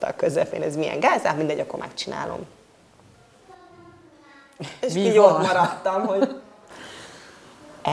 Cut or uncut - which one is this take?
uncut